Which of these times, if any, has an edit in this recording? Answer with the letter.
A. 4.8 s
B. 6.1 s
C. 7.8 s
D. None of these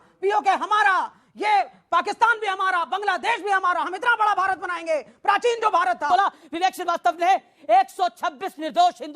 B